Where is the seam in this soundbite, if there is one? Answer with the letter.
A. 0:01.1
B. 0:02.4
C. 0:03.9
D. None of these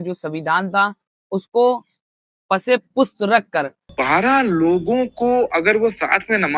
C